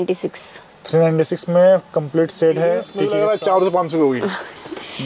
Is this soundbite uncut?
no; 1 cut; at 2.9 s

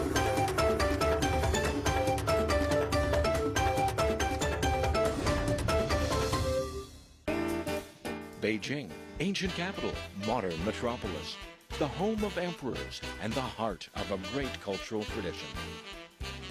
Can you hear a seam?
no; 0 cuts

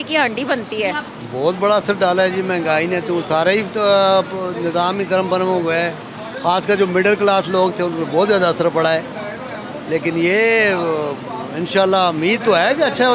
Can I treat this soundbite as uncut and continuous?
yes; 0 cuts

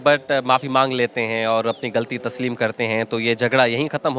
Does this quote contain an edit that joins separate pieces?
no; 0 cuts

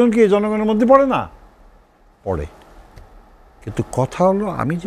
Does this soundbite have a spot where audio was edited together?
no; 0 cuts

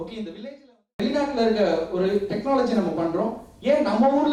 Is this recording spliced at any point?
yes; 1 cut; at 0.9 s

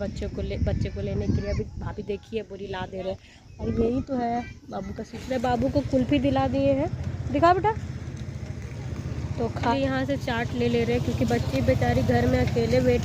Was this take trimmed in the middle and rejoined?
yes; 2 cuts; at 5.1 s, 9.7 s

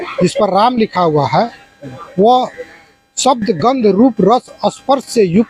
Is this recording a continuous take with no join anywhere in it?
yes; 0 cuts

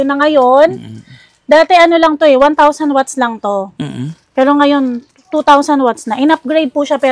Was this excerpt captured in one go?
yes; 0 cuts

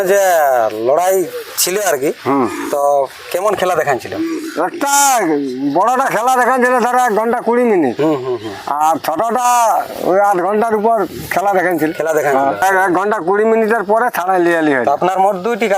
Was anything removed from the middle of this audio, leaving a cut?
yes; 1 cut; at 12.6 s

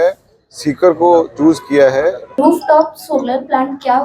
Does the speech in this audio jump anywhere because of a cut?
yes; 1 cut; at 2.3 s

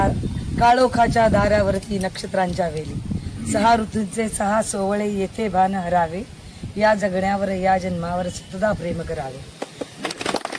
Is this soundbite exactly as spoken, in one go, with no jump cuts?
yes; 0 cuts

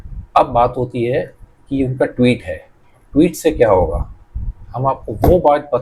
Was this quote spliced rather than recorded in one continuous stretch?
no; 0 cuts

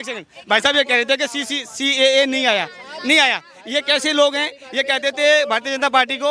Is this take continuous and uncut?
yes; 0 cuts

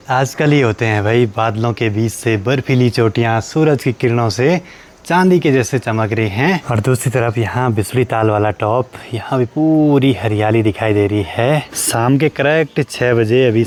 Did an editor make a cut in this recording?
no; 0 cuts

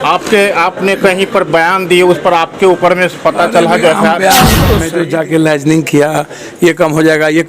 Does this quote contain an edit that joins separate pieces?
yes; 1 cut; at 4.8 s

